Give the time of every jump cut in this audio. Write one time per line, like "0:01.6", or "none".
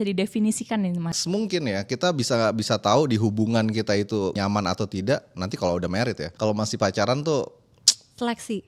0:01.1
0:04.4
0:06.3